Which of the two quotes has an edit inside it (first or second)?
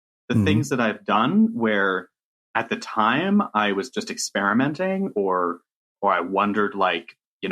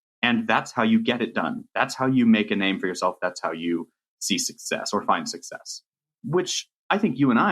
second